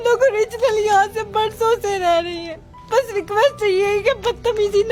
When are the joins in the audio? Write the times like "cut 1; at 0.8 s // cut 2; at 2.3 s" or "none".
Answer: none